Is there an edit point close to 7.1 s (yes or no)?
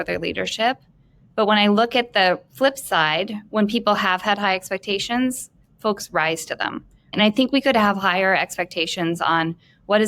yes